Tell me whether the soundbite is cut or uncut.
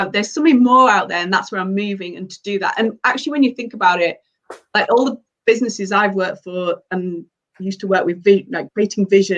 uncut